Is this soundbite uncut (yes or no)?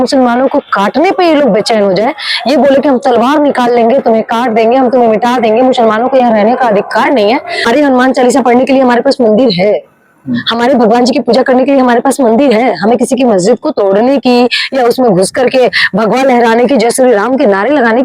no